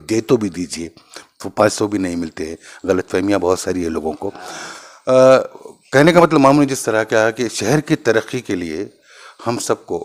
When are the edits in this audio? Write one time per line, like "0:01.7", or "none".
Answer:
none